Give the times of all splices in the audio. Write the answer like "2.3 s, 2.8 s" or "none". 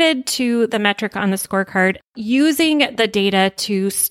2.0 s